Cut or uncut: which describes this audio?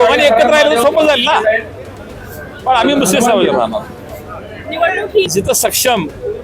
cut